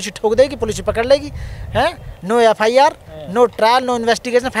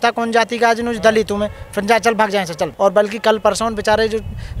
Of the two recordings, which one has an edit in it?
second; 1 cut; at 2.7 s

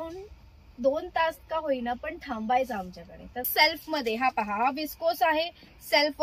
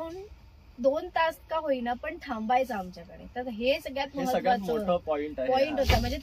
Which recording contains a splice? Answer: first; 1 cut; at 3.5 s

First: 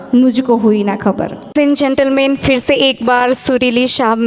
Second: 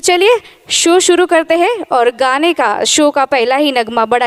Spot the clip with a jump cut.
first; 1 cut; at 1.3 s

